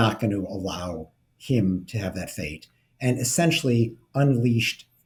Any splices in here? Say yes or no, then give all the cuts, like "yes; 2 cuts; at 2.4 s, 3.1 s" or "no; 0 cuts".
no; 0 cuts